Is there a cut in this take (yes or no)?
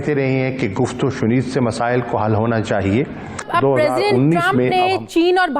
yes